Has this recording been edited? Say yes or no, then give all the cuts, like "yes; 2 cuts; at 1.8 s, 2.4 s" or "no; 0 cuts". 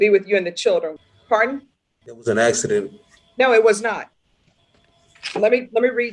yes; 1 cut; at 1.0 s